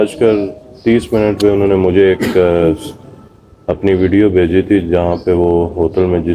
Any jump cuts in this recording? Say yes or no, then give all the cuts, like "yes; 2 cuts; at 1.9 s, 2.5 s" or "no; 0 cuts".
no; 0 cuts